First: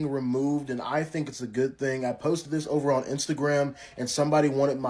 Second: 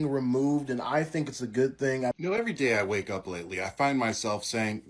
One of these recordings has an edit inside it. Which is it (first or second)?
second